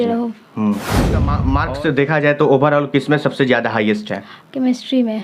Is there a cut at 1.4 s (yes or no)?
yes